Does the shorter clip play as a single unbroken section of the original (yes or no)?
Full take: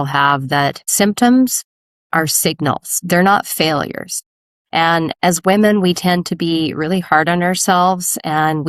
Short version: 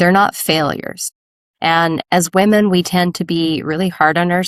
yes